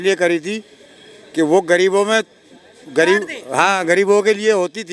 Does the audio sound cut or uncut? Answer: uncut